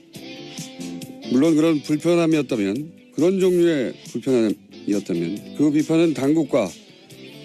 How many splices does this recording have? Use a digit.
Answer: 1